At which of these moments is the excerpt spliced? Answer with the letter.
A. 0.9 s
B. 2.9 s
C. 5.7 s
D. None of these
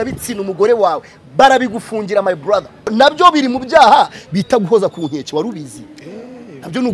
B